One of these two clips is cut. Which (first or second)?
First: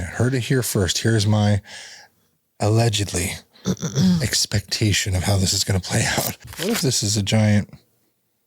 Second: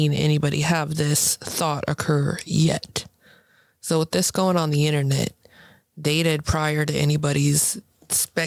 first